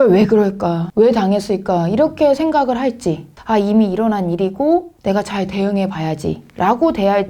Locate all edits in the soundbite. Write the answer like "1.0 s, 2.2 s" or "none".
3.4 s, 4.9 s